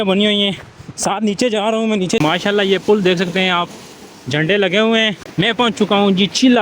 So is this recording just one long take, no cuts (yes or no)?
no